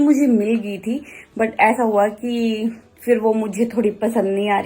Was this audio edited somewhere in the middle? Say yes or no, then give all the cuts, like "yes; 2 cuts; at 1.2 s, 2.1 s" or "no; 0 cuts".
no; 0 cuts